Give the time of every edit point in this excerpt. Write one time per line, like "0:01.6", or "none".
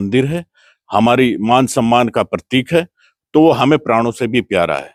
none

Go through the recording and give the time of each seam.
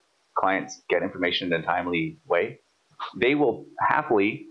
none

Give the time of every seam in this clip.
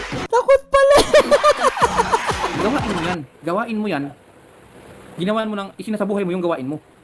0:02.6

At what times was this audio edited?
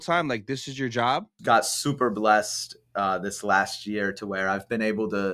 0:01.3

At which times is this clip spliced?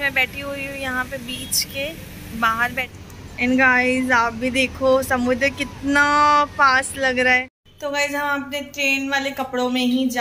0:02.9
0:07.6

